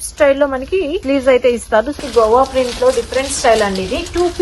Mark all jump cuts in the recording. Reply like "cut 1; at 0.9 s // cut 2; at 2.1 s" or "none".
cut 1; at 1.0 s // cut 2; at 2.0 s

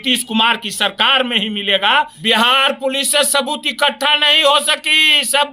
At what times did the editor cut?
cut 1; at 2.2 s

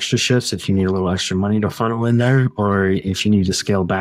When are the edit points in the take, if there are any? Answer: none

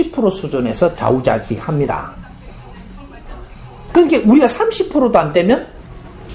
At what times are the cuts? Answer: none

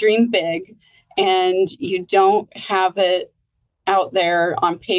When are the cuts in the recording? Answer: none

